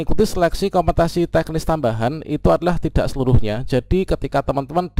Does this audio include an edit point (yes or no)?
no